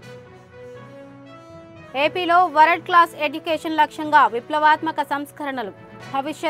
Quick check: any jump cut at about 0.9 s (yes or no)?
yes